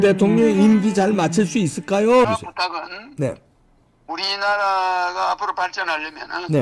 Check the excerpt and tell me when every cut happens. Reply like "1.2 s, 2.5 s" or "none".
2.3 s